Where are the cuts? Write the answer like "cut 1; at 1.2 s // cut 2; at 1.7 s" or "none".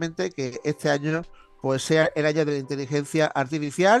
none